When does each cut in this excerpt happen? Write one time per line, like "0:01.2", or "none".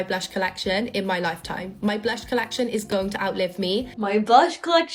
none